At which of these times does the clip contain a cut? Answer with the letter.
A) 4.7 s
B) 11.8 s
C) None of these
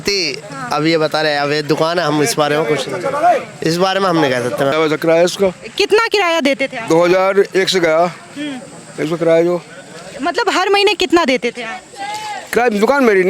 A